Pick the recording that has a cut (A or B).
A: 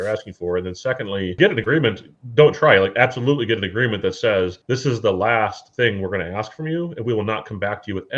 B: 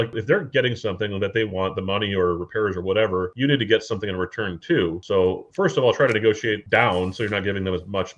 A